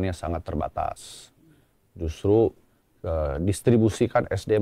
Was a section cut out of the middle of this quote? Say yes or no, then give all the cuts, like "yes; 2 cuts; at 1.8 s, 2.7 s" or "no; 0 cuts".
no; 0 cuts